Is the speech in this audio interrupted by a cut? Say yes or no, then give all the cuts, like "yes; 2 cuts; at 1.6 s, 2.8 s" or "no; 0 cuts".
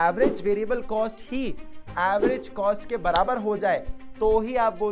no; 0 cuts